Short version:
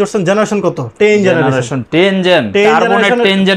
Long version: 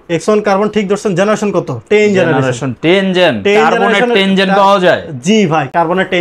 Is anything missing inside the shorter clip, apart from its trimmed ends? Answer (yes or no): no